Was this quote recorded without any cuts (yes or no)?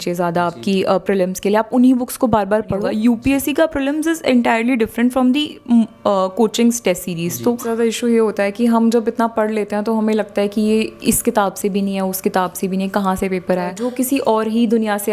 no